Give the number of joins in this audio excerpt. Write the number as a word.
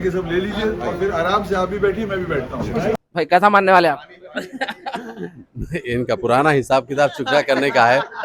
one